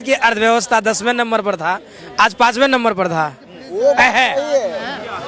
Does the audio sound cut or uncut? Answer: uncut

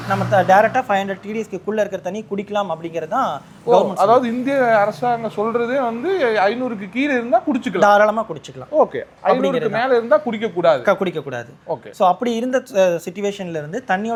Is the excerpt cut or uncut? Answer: uncut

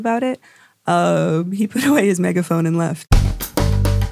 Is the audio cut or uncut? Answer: cut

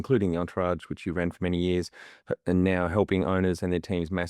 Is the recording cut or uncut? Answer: uncut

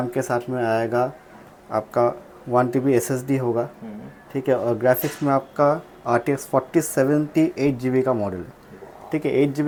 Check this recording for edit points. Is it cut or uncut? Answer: uncut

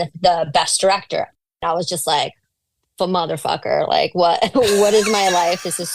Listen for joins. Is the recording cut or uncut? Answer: cut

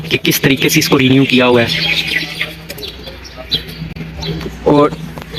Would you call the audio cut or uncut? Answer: uncut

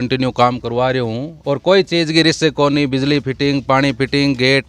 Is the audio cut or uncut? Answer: cut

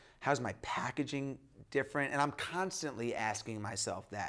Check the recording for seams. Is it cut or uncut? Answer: uncut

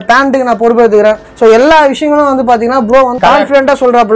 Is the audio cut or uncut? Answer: cut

